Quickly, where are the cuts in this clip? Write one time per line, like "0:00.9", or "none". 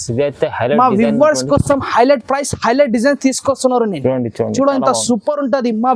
none